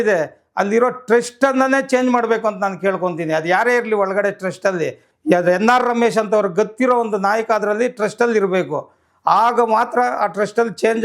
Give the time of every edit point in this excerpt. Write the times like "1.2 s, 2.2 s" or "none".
5.0 s